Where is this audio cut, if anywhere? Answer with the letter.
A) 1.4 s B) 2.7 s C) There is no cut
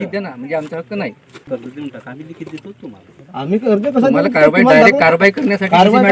A